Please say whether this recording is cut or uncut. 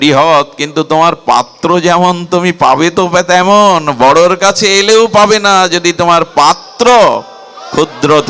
uncut